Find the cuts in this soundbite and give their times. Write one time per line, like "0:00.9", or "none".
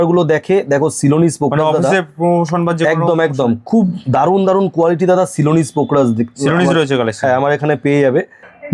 none